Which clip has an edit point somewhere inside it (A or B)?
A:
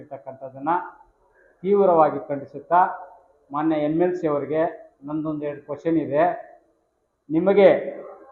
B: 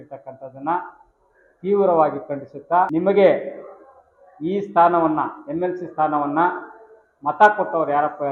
B